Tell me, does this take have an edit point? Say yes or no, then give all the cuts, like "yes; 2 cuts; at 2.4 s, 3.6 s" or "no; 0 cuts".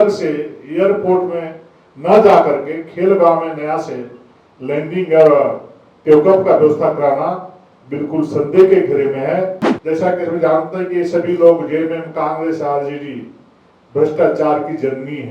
yes; 1 cut; at 9.7 s